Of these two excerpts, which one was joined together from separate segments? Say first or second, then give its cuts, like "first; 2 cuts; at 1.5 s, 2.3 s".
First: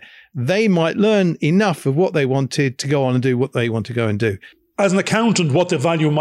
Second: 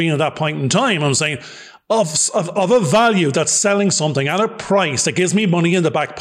first; 1 cut; at 4.5 s